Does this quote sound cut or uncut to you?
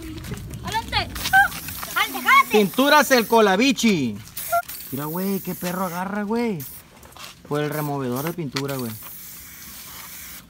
cut